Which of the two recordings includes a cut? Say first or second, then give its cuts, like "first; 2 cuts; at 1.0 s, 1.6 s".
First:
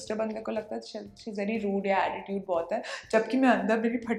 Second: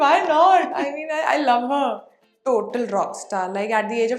second; 1 cut; at 2.2 s